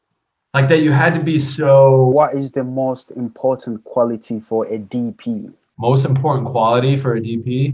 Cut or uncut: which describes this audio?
cut